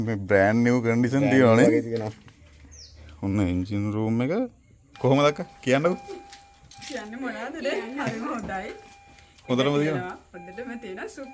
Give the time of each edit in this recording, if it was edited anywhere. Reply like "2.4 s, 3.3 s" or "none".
4.9 s